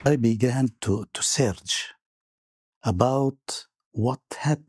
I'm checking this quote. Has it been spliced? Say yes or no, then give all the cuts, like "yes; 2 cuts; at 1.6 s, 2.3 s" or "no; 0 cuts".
no; 0 cuts